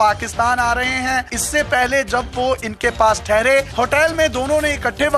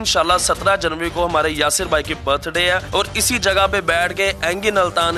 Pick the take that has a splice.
first; 1 cut; at 3.7 s

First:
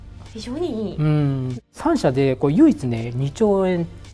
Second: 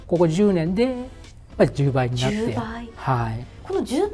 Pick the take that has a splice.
first; 1 cut; at 1.7 s

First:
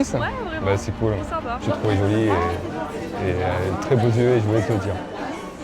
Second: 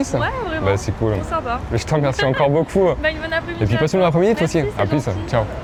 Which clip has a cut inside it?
first; 1 cut; at 1.6 s

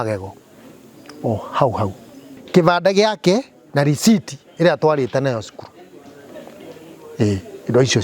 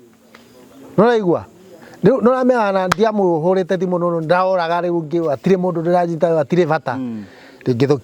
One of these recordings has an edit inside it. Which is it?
first; 1 cut; at 2.4 s

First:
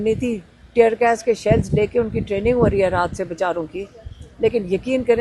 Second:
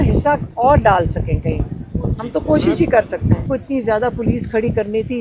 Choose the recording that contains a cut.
second; 1 cut; at 3.4 s

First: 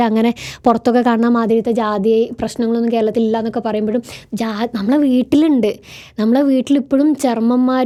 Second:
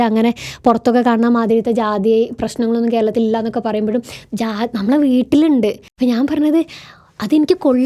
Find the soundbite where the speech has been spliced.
second; 1 cut; at 5.9 s

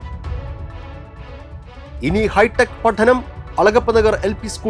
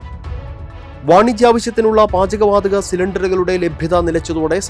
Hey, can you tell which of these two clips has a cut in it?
second; 1 cut; at 1.0 s

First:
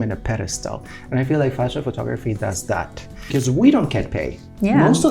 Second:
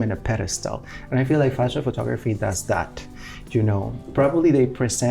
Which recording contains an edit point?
first; 1 cut; at 3.3 s

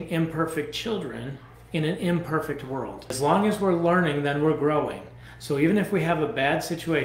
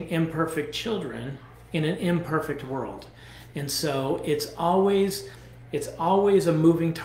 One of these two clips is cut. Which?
first; 1 cut; at 3.0 s

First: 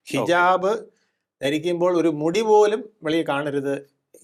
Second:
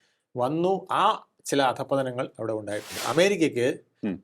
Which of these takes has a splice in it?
second; 1 cut; at 3.1 s

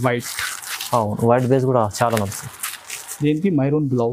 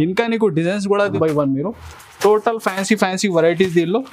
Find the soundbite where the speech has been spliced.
second; 1 cut; at 1.1 s

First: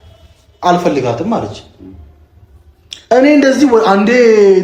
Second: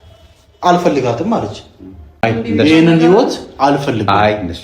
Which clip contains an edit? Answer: second; 1 cut; at 2.2 s

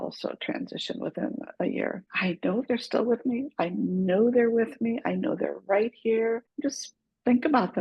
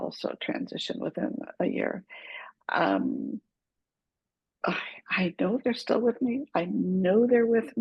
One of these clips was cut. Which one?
first; 2 cuts; at 2.1 s, 6.5 s

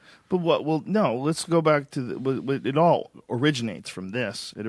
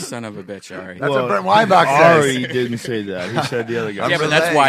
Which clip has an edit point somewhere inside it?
second; 1 cut; at 3.3 s

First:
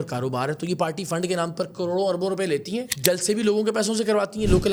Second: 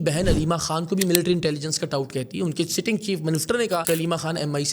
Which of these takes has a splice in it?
second; 1 cut; at 3.8 s

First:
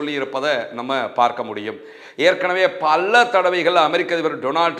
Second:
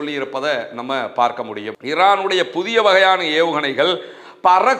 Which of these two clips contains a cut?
second; 1 cut; at 1.8 s

